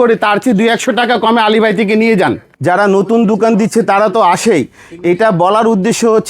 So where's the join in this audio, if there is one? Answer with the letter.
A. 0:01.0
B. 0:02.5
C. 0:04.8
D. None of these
B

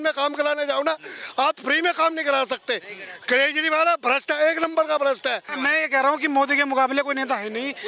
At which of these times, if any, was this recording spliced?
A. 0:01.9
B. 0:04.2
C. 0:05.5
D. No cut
C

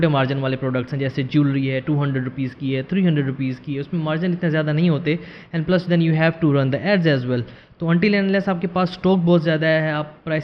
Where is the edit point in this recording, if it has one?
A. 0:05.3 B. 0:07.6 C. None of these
C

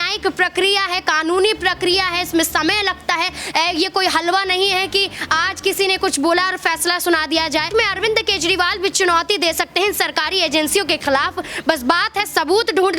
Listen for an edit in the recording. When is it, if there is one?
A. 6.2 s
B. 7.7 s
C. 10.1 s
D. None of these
B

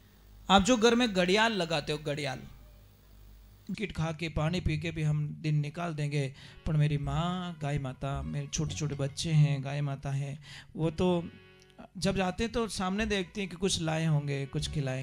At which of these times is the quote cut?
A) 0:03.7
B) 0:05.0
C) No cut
A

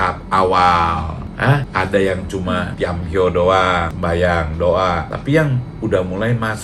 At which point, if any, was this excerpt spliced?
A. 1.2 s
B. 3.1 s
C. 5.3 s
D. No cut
D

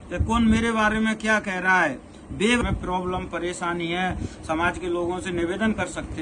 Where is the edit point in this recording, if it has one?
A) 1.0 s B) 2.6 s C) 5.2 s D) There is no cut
B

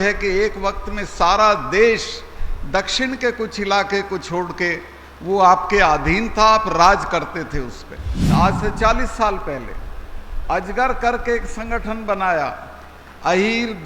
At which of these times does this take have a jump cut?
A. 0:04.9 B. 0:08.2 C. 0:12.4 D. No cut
B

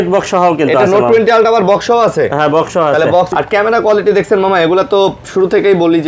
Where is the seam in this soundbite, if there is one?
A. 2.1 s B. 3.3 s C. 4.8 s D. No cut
B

